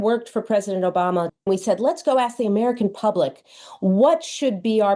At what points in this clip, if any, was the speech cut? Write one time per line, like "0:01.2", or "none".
0:01.4